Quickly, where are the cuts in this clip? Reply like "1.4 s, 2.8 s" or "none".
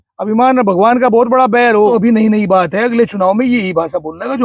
1.9 s